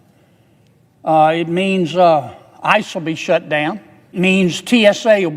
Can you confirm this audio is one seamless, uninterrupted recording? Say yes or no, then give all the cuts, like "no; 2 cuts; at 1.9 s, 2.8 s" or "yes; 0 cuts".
no; 1 cut; at 4.1 s